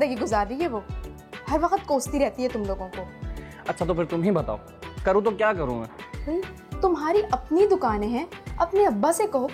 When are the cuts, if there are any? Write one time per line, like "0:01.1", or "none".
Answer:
none